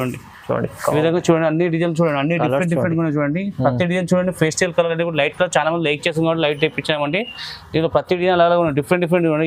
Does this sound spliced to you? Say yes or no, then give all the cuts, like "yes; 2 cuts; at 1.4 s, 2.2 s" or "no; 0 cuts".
no; 0 cuts